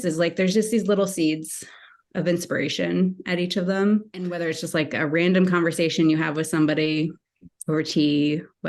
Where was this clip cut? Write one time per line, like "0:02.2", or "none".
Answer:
0:04.4